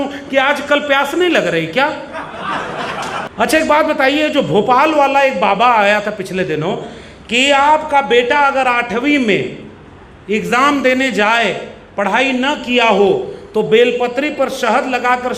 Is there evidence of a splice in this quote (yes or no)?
yes